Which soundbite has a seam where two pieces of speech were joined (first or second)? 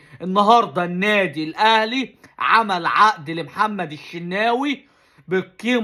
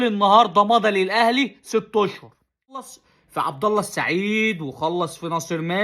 second